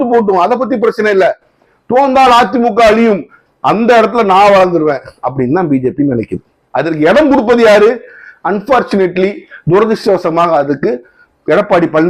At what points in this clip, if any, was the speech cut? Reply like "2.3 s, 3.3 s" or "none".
none